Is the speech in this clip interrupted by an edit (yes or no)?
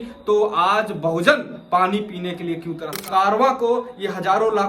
yes